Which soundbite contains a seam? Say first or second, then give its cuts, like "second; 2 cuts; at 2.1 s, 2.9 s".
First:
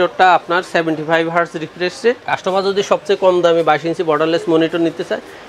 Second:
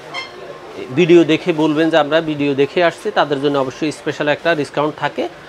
first; 1 cut; at 2.2 s